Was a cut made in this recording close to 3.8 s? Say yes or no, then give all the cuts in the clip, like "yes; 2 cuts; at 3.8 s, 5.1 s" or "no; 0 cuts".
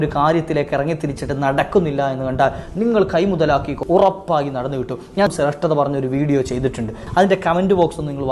yes; 3 cuts; at 3.8 s, 5.3 s, 7.0 s